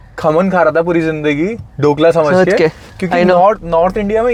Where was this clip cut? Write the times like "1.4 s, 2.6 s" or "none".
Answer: none